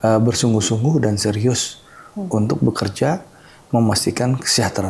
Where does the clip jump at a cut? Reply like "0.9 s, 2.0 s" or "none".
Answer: none

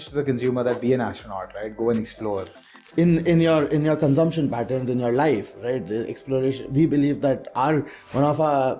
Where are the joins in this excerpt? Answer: none

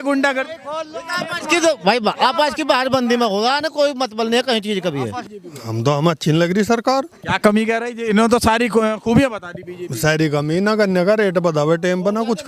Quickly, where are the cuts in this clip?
5.2 s

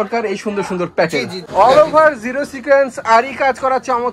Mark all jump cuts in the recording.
1.4 s

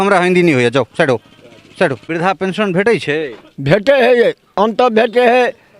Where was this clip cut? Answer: 2.0 s

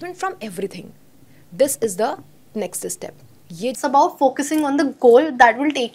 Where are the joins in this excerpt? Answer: 3.7 s

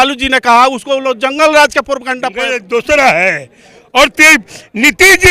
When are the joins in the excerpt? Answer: 2.3 s

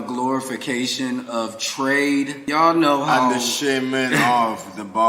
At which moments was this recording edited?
2.4 s

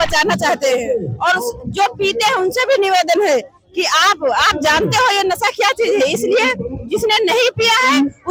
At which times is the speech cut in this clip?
none

